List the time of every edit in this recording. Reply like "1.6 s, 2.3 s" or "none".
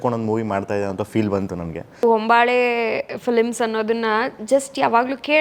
2.0 s